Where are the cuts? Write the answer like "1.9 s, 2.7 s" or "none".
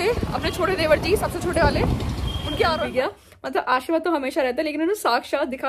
2.8 s